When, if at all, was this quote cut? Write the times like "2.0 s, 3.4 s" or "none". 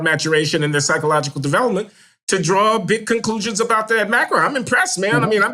none